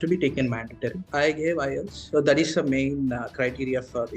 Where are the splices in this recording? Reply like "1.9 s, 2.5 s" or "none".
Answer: 1.0 s